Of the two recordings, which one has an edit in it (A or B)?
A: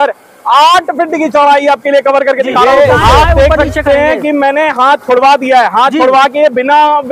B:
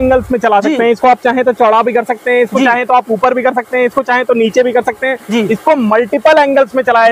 A